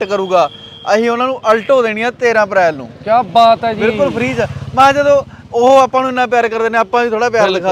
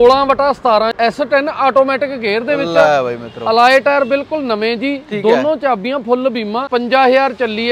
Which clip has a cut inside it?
second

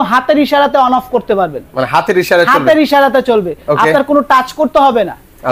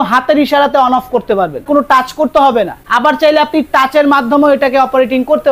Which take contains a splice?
second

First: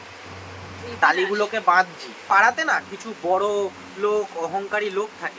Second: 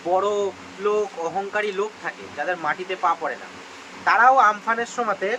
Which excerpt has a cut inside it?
first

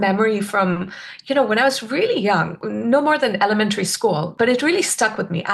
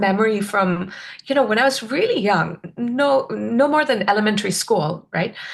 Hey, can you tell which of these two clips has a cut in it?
first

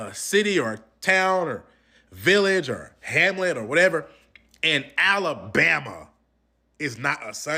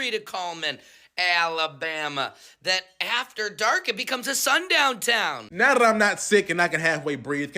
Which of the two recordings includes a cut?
second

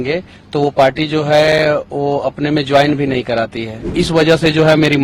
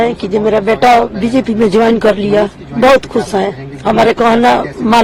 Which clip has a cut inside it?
first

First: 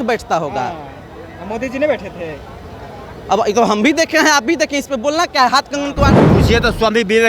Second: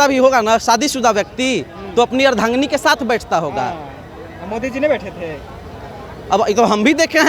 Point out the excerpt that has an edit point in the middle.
first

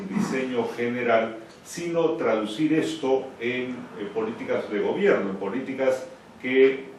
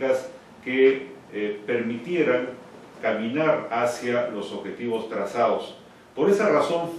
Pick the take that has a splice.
second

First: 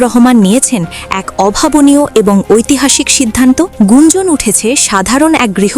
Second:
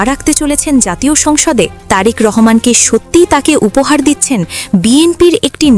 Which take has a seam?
first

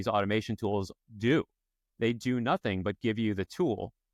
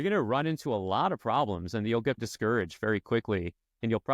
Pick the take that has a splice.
second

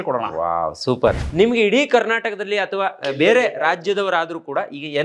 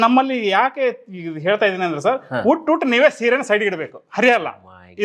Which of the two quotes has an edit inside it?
first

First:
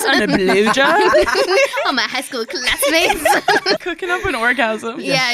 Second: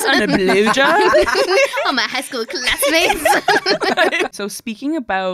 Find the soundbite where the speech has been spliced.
first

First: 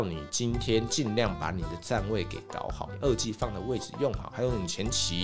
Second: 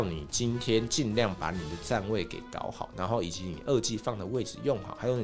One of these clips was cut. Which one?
first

